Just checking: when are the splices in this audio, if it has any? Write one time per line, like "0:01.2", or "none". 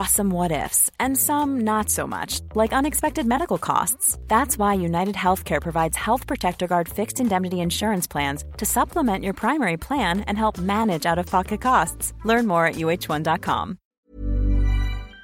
0:13.9